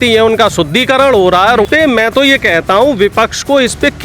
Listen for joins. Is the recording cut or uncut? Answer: cut